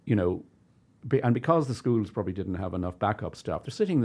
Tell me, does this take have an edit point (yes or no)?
no